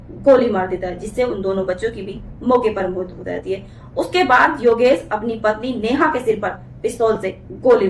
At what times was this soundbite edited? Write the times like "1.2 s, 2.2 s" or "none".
none